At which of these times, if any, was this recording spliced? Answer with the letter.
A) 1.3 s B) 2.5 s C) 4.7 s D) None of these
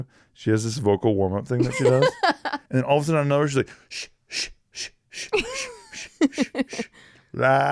B